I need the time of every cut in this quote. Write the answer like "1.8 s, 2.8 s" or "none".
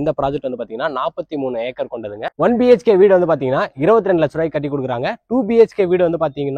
2.3 s